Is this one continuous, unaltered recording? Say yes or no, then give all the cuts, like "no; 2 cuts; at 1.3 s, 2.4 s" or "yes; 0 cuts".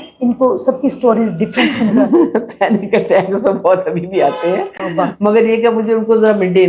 yes; 0 cuts